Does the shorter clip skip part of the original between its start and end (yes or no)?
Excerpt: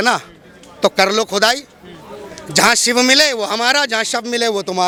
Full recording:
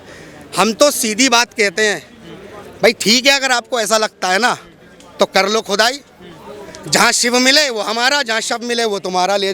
no